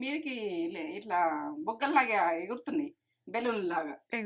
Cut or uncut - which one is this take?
uncut